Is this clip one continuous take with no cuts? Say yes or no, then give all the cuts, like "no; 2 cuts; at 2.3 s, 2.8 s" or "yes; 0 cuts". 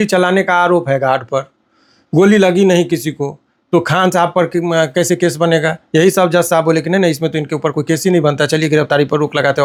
yes; 0 cuts